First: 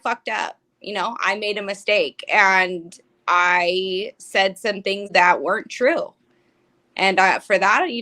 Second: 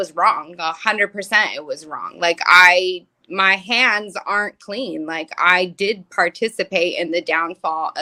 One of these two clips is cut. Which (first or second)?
first